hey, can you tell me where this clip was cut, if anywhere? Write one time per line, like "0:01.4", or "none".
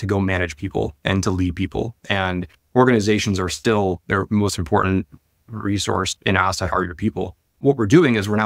0:07.4